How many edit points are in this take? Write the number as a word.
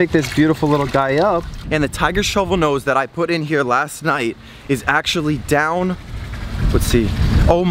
one